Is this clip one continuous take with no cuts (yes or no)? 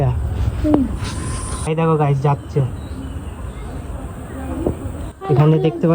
no